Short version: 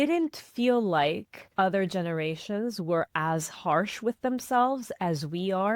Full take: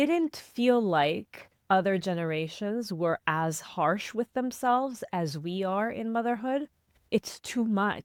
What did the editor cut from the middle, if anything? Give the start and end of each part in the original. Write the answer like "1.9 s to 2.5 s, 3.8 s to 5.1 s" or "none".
1.3 s to 1.5 s